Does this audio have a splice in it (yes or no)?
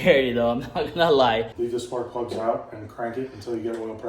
yes